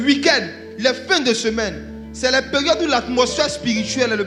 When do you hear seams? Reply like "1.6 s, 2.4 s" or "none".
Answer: none